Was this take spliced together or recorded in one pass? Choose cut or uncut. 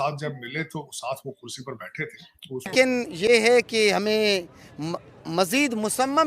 cut